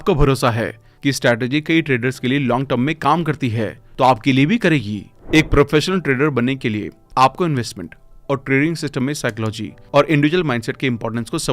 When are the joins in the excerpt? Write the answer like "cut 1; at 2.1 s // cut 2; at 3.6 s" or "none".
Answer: cut 1; at 5.1 s